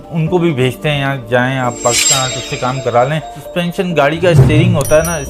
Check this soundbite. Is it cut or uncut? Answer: cut